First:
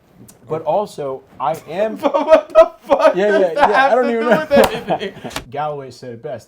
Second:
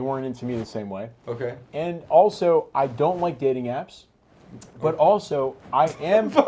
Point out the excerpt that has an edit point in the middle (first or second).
first